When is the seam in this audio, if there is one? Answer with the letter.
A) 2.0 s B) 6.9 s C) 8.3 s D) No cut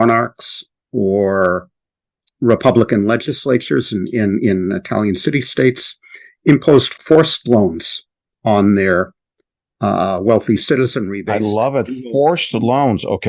B